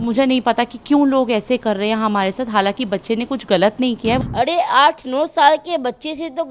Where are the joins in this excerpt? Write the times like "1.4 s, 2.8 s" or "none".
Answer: 4.2 s